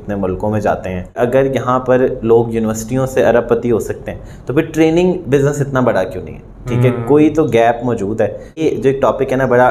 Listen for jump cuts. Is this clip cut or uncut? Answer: cut